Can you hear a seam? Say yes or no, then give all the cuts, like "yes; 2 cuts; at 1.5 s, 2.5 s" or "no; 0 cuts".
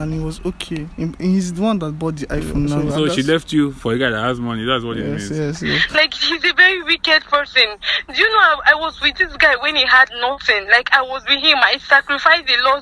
yes; 2 cuts; at 2.8 s, 5.9 s